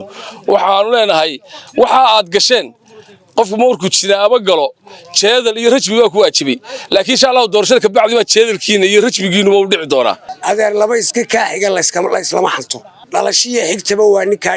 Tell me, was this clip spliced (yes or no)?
yes